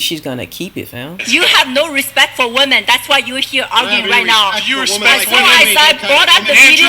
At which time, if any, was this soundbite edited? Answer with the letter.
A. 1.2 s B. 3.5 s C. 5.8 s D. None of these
A